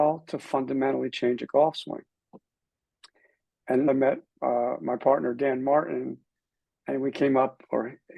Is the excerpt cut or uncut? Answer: cut